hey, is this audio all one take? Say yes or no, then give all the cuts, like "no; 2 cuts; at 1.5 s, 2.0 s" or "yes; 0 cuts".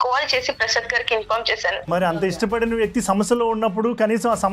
no; 1 cut; at 1.9 s